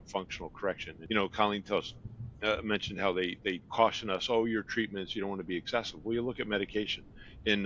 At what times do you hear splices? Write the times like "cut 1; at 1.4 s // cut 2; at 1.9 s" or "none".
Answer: cut 1; at 0.9 s